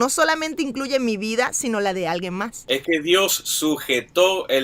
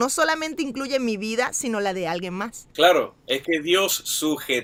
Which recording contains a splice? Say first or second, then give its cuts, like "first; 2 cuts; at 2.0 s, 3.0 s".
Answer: first; 1 cut; at 2.6 s